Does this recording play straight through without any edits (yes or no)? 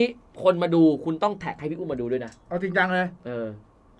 no